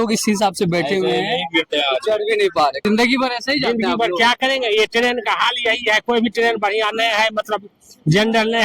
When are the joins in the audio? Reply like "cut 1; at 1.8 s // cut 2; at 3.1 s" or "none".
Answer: cut 1; at 2.8 s